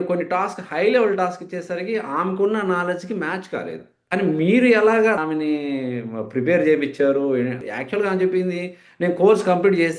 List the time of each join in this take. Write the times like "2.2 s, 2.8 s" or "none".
3.9 s, 5.2 s, 7.6 s